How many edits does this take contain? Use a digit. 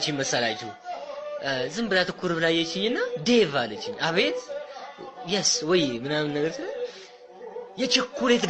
0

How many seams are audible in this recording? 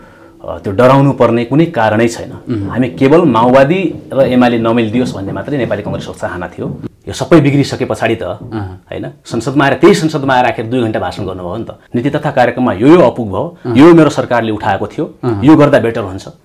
2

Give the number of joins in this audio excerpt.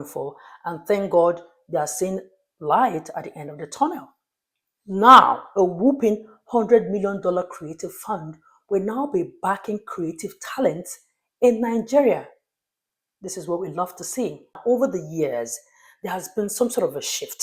1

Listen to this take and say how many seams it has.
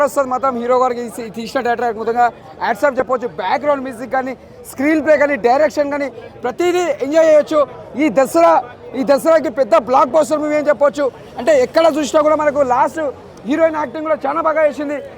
0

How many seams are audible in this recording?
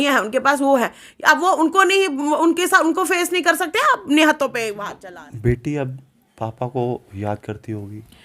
1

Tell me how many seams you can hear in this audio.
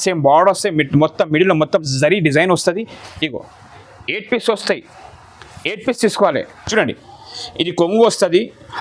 1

